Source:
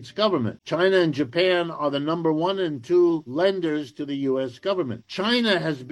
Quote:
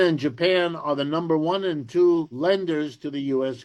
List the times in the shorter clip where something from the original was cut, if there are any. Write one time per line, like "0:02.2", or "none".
none